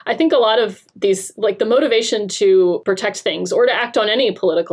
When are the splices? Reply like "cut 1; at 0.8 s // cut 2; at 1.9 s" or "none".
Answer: cut 1; at 2.8 s